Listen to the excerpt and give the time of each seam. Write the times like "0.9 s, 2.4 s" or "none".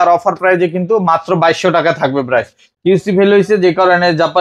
2.6 s